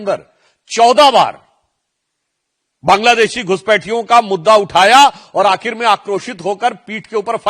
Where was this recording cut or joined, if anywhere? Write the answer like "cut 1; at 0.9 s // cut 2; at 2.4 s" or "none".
none